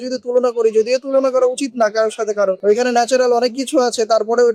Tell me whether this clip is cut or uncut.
uncut